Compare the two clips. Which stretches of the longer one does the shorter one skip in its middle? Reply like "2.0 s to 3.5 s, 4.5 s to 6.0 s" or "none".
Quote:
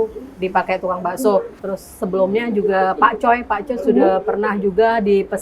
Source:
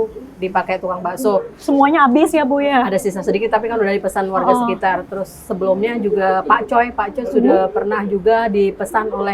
1.6 s to 5.0 s

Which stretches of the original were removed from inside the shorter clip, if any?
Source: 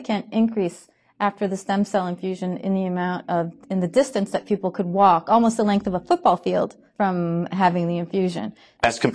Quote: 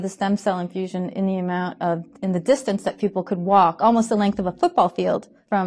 none

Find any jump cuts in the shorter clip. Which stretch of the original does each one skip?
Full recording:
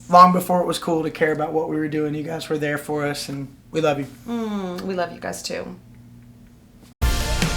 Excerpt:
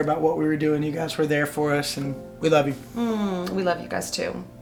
none

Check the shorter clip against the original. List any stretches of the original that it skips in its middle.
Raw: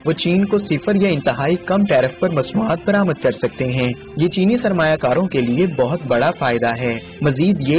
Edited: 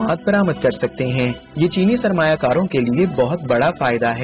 none

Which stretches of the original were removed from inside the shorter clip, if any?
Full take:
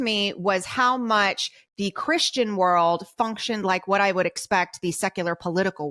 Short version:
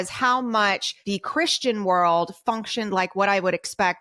1.5 s to 1.6 s

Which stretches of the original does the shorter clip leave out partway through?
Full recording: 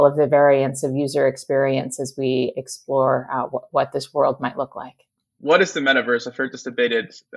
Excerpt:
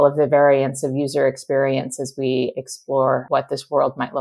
3.2 s to 3.7 s

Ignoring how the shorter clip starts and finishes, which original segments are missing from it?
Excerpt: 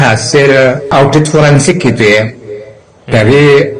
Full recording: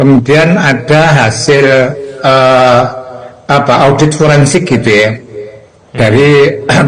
2.1 s to 3.8 s

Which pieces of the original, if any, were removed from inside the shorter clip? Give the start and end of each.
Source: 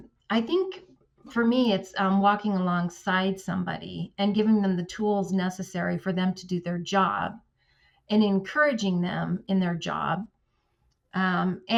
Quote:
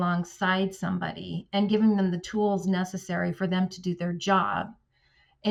none

